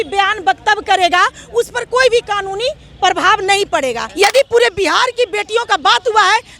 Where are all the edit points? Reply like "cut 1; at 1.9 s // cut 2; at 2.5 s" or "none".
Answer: cut 1; at 4.1 s